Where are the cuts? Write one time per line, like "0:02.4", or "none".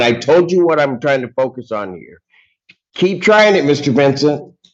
none